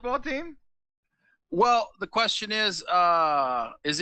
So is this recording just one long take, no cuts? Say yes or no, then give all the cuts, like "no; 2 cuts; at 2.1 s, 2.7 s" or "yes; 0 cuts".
yes; 0 cuts